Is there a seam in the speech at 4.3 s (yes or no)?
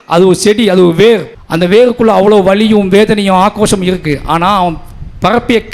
no